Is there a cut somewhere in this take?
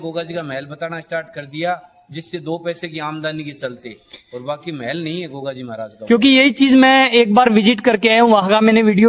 no; 0 cuts

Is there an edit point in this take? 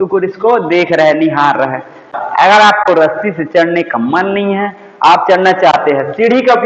yes; 1 cut; at 2.2 s

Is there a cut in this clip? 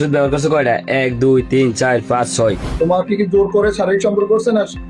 yes; 1 cut; at 2.7 s

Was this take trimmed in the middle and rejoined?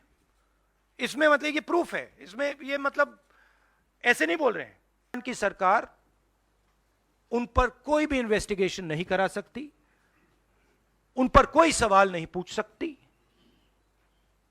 yes; 1 cut; at 5.2 s

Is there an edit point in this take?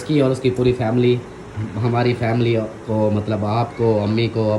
no; 0 cuts

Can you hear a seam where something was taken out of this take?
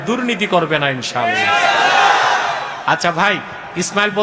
yes; 1 cut; at 2.8 s

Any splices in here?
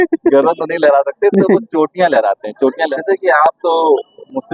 yes; 1 cut; at 2.9 s

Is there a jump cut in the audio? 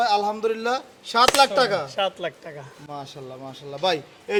no; 0 cuts

